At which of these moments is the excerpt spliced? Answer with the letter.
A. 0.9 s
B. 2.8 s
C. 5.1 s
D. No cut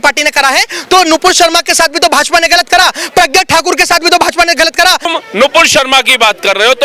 C